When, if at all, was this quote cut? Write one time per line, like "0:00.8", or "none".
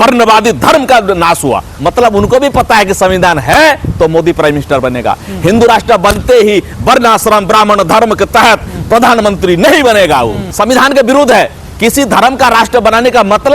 0:01.7
0:10.4